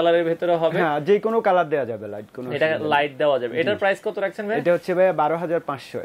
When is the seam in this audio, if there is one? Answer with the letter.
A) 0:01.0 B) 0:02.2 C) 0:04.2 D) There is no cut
D